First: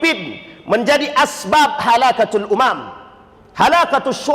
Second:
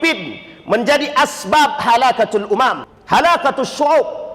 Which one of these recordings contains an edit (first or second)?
second